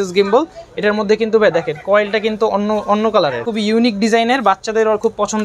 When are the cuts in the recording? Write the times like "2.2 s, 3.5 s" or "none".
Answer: 3.5 s